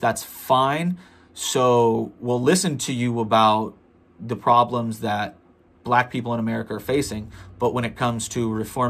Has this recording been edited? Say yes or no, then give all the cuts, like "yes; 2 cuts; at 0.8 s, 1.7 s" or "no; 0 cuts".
no; 0 cuts